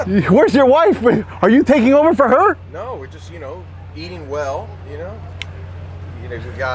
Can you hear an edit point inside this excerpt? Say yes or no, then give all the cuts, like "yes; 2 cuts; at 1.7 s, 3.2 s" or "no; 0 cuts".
no; 0 cuts